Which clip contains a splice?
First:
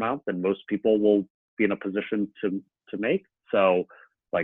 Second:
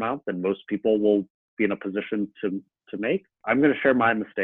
second; 1 cut; at 3.4 s

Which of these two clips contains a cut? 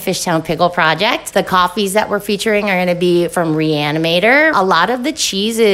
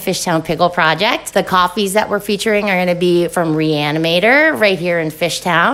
first; 1 cut; at 4.5 s

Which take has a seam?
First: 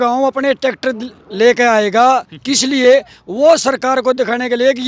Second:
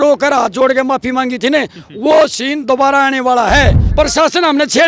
second; 1 cut; at 3.8 s

